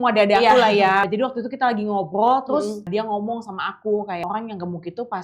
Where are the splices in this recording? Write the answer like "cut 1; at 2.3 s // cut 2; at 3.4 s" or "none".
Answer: cut 1; at 1.1 s // cut 2; at 2.9 s // cut 3; at 4.2 s